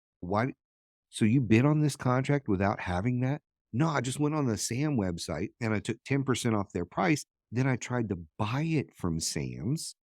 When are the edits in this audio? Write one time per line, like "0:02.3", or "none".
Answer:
0:05.5